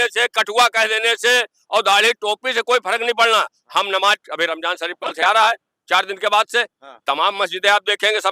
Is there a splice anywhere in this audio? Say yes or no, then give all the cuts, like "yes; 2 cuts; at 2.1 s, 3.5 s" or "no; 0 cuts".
no; 0 cuts